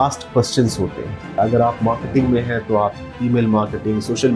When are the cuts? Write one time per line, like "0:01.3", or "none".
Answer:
0:01.4